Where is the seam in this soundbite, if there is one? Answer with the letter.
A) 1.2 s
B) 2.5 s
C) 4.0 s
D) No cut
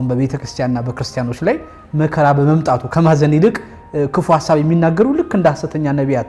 D